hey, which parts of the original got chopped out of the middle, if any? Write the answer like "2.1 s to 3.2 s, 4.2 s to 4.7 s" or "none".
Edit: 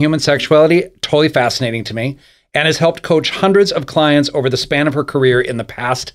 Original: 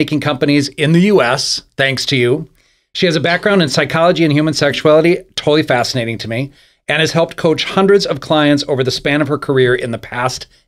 none